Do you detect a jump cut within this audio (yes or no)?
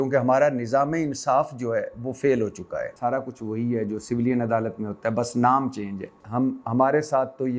yes